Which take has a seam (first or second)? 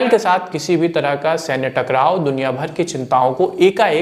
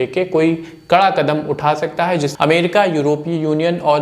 second